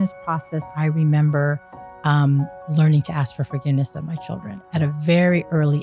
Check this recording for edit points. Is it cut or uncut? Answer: uncut